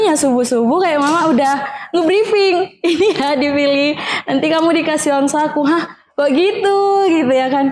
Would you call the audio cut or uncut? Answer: uncut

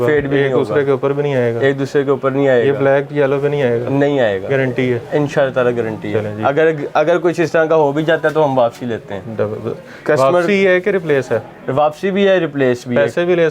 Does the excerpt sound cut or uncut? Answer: uncut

